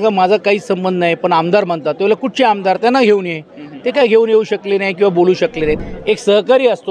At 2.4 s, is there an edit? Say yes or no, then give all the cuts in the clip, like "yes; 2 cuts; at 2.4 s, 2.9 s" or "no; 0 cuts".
no; 1 cut; at 5.8 s